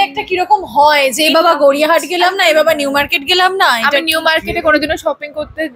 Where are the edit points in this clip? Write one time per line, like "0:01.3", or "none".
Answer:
none